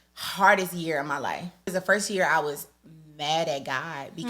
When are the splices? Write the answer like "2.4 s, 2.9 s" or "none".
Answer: 1.7 s